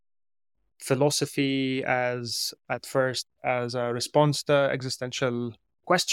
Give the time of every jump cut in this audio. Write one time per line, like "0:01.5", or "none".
none